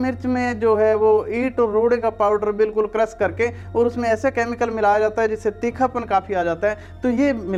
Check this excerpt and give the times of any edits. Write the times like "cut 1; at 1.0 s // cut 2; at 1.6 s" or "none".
none